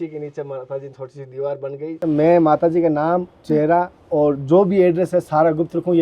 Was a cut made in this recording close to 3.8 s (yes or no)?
no